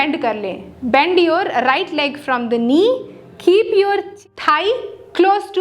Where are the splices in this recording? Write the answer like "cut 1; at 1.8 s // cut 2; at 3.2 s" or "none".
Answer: cut 1; at 4.1 s